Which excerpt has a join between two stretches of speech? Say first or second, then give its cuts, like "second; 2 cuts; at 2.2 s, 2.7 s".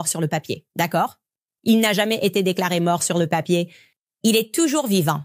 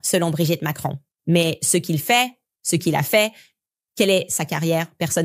second; 1 cut; at 1.1 s